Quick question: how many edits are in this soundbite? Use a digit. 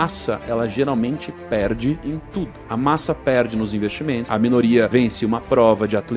3